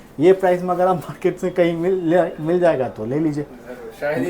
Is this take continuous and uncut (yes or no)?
yes